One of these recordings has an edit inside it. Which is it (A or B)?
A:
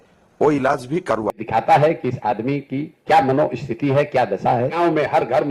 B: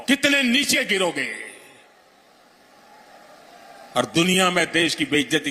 A